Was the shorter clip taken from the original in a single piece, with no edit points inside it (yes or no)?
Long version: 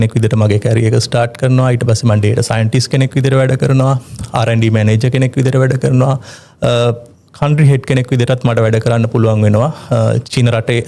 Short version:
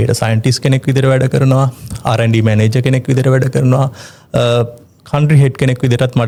yes